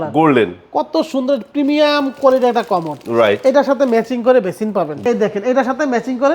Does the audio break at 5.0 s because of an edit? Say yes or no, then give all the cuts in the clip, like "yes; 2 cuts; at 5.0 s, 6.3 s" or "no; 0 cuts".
yes; 1 cut; at 5.0 s